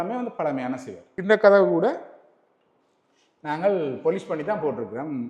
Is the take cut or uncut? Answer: cut